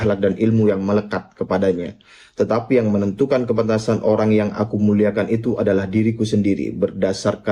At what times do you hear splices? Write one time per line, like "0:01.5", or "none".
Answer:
none